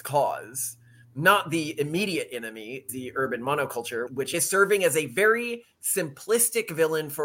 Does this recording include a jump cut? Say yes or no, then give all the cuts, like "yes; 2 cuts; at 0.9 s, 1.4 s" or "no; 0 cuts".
yes; 2 cuts; at 2.9 s, 4.2 s